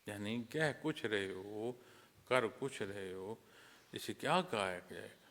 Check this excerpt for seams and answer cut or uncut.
uncut